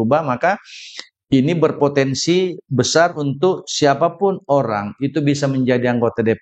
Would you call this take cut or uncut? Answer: uncut